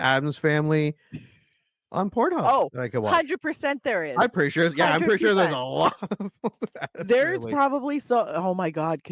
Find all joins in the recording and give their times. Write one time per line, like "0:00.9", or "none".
none